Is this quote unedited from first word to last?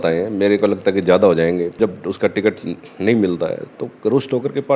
no; 1 cut; at 1.8 s

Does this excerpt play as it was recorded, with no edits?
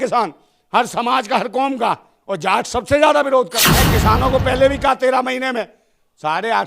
no; 1 cut; at 3.6 s

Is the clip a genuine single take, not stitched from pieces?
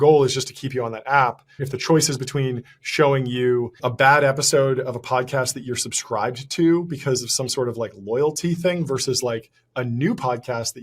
no; 2 cuts; at 1.7 s, 3.8 s

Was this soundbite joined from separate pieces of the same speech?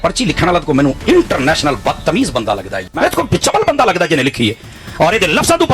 yes; 1 cut; at 2.8 s

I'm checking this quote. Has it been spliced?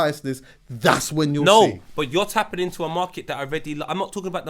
no; 0 cuts

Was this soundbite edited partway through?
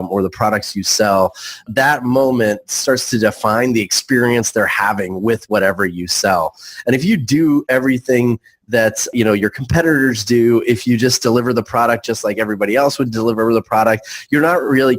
yes; 2 cuts; at 1.7 s, 9.1 s

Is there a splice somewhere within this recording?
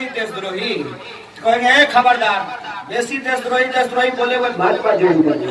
no; 0 cuts

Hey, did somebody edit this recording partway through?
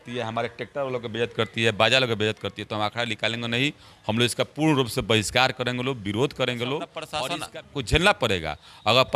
yes; 1 cut; at 7.0 s

